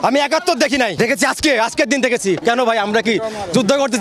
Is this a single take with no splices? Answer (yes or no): no